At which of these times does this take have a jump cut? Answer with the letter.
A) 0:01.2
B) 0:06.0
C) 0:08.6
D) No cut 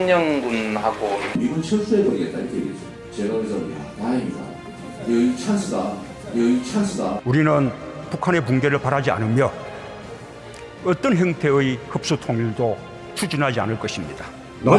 A